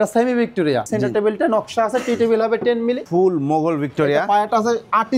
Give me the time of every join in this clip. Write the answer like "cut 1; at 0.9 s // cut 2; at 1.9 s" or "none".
cut 1; at 0.9 s // cut 2; at 3.0 s

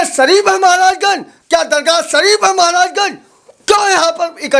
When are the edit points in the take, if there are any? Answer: none

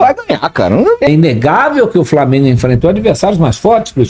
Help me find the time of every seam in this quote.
cut 1; at 1.1 s

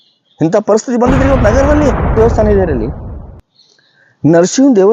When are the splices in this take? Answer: cut 1; at 2.2 s

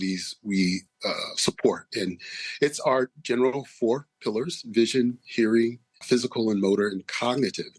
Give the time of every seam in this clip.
cut 1; at 5.9 s

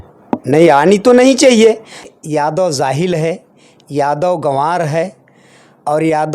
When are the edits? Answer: cut 1; at 2.0 s

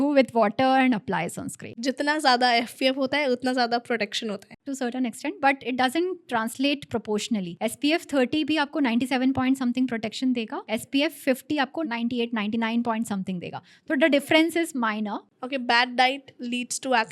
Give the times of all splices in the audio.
cut 1; at 1.7 s // cut 2; at 4.5 s // cut 3; at 7.5 s // cut 4; at 10.6 s // cut 5; at 11.8 s // cut 6; at 15.2 s

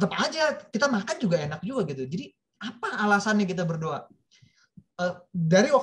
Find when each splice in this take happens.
none

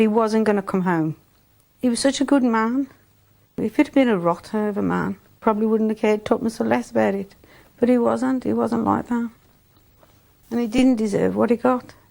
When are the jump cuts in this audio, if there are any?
cut 1; at 1.6 s // cut 2; at 3.5 s // cut 3; at 5.4 s

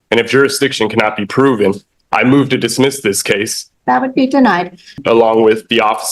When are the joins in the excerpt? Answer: cut 1; at 3.6 s // cut 2; at 5.0 s

